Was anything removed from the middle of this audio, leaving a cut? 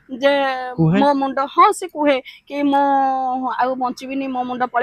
no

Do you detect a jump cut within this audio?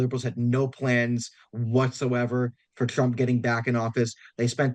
no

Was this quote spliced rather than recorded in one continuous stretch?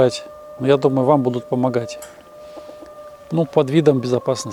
no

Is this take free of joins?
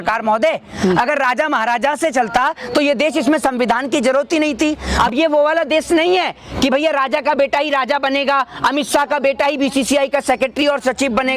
no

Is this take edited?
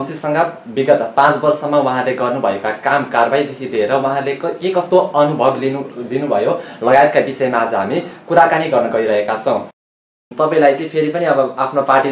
yes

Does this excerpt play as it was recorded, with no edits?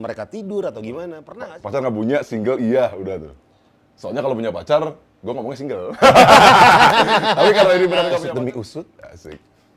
no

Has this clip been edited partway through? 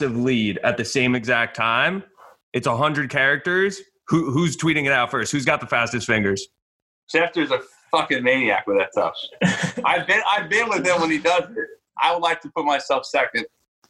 yes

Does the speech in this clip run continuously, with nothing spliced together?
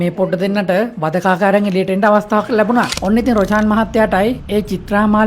no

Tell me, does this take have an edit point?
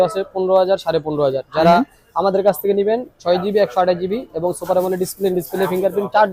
no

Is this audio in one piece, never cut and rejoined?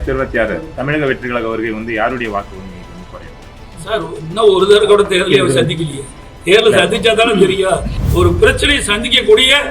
no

